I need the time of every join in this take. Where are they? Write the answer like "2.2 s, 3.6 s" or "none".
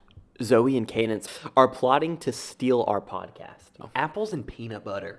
1.3 s, 3.8 s